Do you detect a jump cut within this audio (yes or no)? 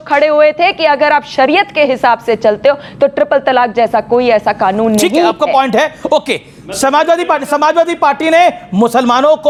no